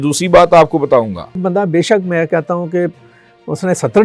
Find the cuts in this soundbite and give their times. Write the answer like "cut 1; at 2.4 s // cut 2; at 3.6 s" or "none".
cut 1; at 1.4 s